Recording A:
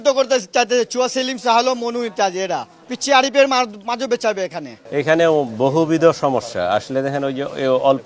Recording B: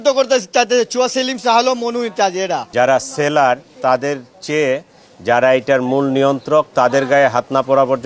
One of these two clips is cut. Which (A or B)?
B